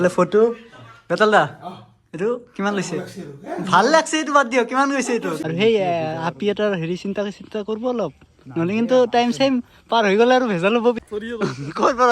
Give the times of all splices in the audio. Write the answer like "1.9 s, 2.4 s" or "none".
5.4 s, 11.0 s